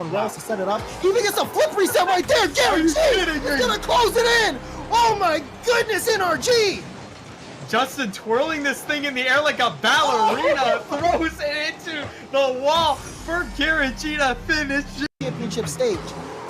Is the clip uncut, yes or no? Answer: no